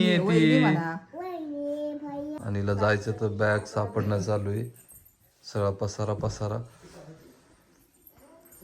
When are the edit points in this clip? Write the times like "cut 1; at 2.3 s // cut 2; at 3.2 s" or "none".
cut 1; at 2.4 s